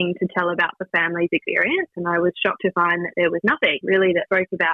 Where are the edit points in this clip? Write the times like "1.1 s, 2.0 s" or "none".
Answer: 1.9 s

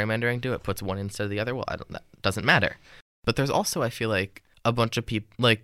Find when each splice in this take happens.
3.1 s, 4.4 s

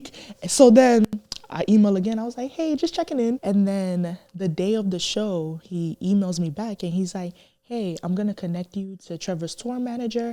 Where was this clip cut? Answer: 3.4 s

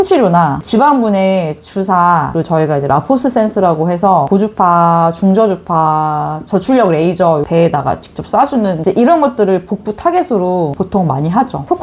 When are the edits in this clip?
2.3 s, 7.5 s, 8.8 s

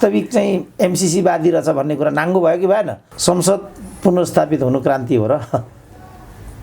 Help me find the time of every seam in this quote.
3.0 s

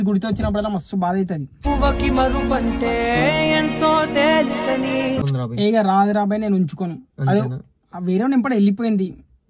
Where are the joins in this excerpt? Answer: 5.2 s

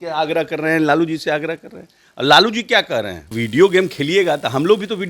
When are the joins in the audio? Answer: 3.2 s

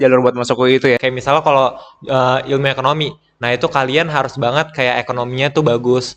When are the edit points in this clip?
1.0 s

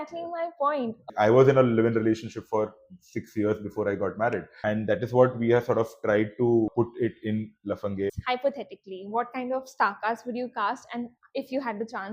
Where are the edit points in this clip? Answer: 1.0 s, 4.5 s, 6.7 s, 8.2 s

